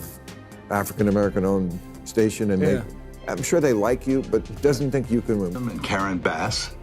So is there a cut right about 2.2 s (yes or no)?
no